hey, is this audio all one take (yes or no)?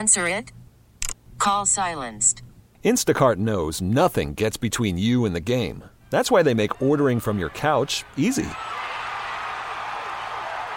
yes